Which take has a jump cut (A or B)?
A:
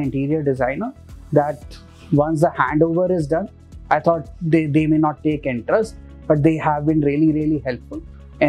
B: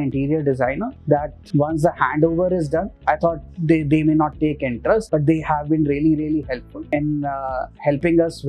B